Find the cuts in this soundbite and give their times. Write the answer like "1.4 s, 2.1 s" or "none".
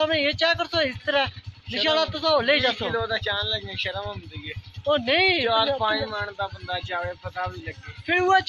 none

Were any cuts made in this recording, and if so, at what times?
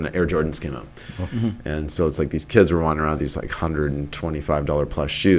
none

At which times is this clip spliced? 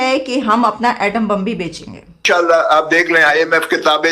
2.1 s

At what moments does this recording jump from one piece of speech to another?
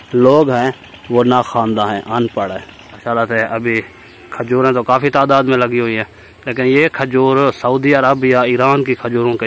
2.9 s

